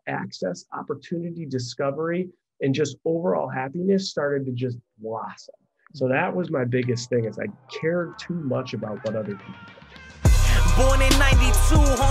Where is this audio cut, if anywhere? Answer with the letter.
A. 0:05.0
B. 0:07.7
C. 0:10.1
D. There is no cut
C